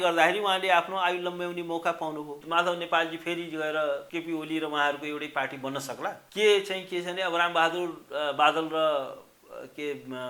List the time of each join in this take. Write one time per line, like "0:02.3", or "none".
0:02.4